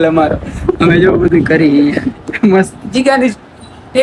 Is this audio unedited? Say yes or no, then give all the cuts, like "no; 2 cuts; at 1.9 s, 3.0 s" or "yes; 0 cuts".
yes; 0 cuts